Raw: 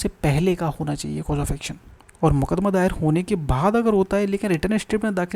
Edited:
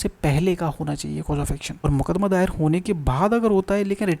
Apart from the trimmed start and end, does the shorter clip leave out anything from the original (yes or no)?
yes